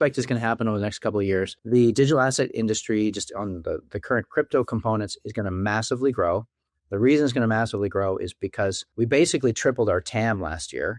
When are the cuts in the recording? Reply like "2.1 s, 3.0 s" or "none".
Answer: 1.6 s, 8.8 s